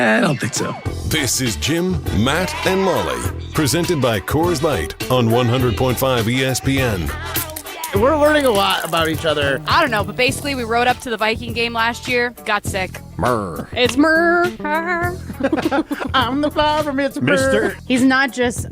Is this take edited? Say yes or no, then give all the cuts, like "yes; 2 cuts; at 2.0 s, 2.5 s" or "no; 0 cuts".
yes; 2 cuts; at 7.8 s, 17.8 s